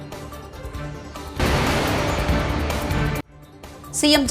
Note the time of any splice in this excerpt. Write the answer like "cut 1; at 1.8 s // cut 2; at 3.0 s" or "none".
cut 1; at 1.4 s // cut 2; at 3.4 s